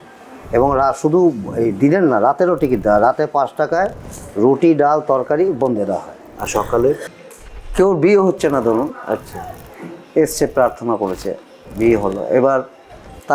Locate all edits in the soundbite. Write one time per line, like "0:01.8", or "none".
0:07.2